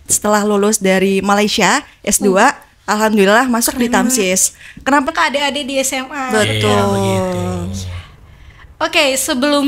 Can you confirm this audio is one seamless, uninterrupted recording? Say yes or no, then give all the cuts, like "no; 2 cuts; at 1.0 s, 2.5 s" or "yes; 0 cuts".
no; 1 cut; at 5.1 s